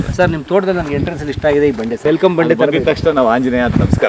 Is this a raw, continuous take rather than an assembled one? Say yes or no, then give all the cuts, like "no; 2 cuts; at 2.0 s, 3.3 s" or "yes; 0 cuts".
no; 1 cut; at 2.0 s